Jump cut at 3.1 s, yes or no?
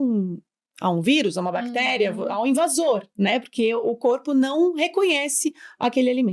no